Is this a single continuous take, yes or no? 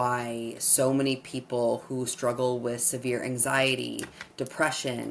yes